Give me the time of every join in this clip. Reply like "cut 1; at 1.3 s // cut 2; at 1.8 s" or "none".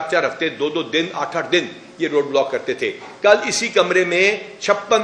none